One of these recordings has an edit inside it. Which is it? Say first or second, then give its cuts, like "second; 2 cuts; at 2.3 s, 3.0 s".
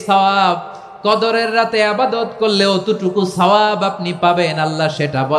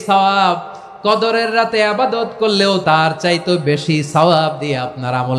second; 1 cut; at 2.8 s